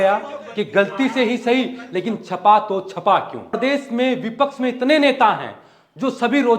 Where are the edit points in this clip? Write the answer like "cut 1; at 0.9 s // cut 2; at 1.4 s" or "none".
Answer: cut 1; at 3.6 s